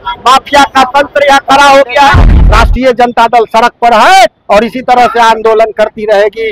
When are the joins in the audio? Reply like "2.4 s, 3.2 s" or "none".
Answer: 2.4 s